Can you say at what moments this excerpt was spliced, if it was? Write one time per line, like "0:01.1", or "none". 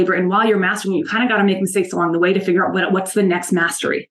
none

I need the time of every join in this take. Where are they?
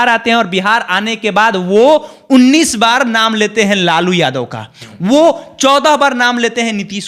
none

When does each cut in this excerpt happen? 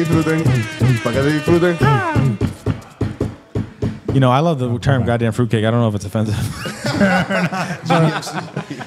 none

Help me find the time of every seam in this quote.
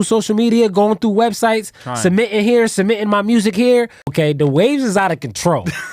0:04.1

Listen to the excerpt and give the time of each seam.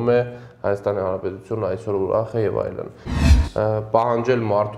0:03.1

